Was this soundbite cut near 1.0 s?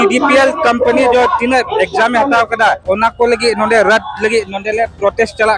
no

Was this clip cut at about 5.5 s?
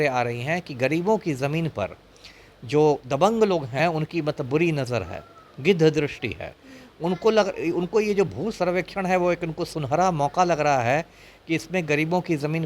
no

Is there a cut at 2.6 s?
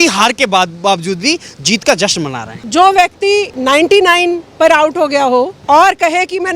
yes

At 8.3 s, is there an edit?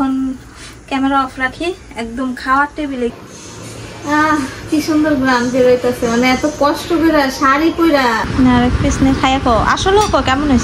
yes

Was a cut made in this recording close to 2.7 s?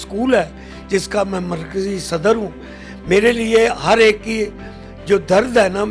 no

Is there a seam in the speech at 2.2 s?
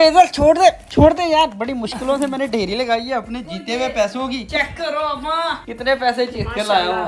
no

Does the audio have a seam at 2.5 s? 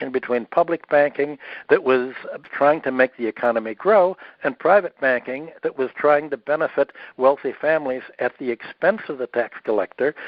yes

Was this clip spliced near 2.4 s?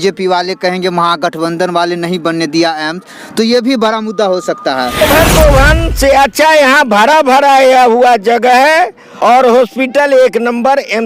no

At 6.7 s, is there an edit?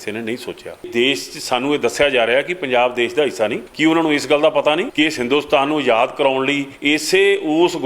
yes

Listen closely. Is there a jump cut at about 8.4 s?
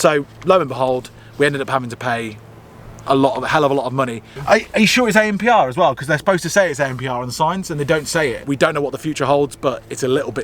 yes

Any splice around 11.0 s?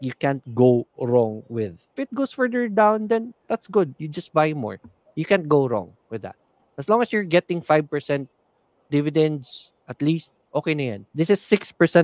yes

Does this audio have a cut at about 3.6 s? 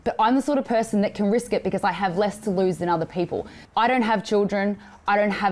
yes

